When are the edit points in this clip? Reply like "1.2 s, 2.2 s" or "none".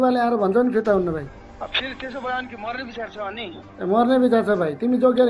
1.4 s